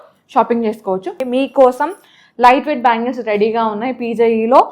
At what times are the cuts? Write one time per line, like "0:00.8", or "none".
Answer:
0:01.1